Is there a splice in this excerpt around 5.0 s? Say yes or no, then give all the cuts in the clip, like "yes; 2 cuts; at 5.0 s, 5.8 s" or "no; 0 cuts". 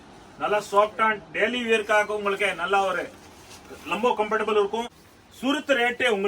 yes; 1 cut; at 5.0 s